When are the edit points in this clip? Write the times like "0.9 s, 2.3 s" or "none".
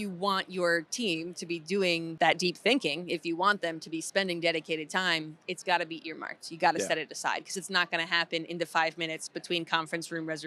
2.1 s

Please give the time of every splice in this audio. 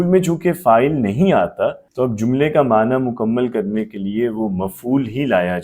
1.8 s

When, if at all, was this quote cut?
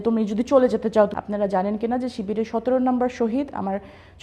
1.1 s

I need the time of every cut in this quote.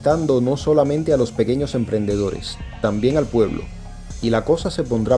none

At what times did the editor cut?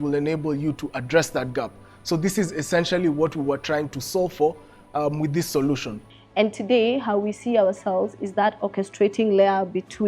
5.9 s

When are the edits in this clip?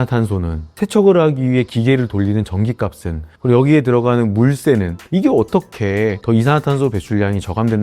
5.0 s

